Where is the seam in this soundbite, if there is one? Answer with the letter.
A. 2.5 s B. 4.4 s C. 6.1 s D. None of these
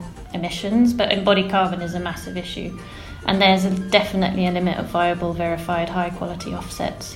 D